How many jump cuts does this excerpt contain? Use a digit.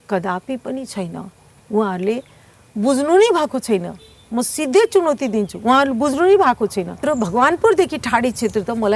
1